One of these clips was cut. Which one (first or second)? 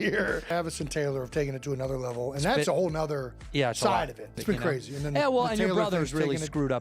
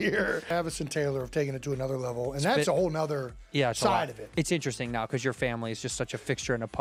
first